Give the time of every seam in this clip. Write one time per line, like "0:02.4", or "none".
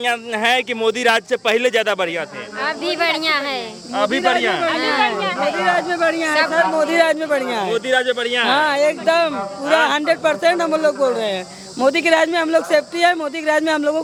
none